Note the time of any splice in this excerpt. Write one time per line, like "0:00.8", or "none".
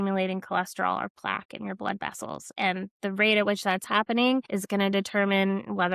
0:04.5